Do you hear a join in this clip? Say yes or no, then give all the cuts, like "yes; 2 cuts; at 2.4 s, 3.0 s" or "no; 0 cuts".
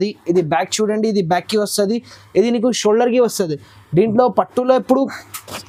no; 0 cuts